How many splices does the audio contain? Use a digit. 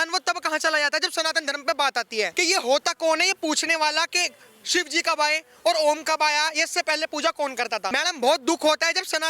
2